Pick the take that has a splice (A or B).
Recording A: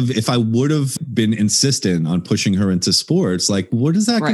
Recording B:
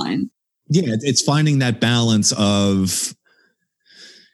A